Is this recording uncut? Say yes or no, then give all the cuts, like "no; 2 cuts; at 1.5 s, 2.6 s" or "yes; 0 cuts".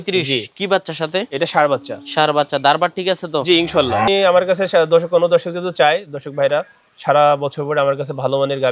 no; 1 cut; at 4.1 s